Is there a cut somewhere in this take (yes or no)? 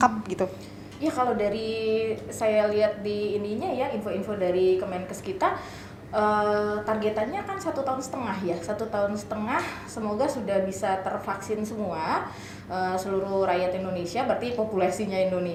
no